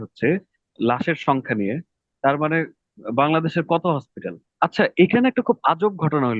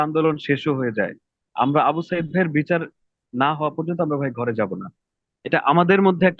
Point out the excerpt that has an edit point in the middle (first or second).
first